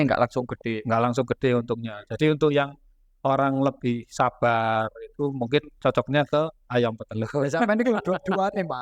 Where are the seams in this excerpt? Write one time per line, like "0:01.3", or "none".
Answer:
none

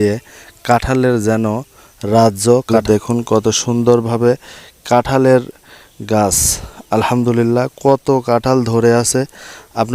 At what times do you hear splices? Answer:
0:02.8

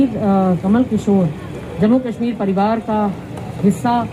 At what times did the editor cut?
none

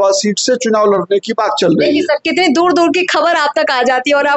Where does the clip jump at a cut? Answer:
none

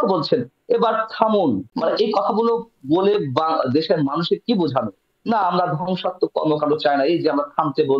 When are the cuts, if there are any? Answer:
0:01.7

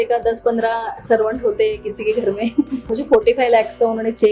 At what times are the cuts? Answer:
0:02.9

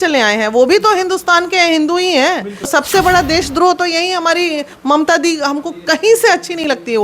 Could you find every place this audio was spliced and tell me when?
0:02.7

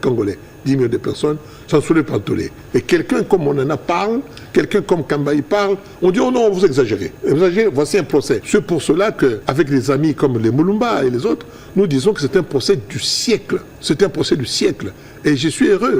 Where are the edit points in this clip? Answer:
0:07.1
0:08.4
0:09.4
0:13.7

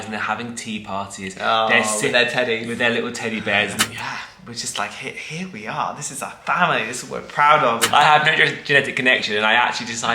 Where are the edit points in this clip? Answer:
0:03.8
0:07.9

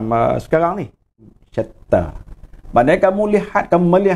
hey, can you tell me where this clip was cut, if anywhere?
0:01.4

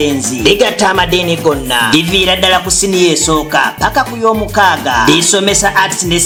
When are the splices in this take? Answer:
none

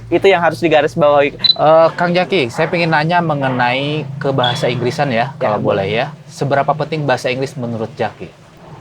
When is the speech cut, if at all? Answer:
0:01.4

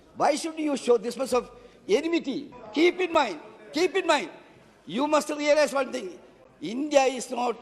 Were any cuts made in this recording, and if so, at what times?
0:02.5

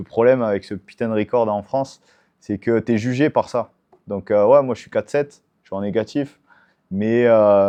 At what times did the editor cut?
none

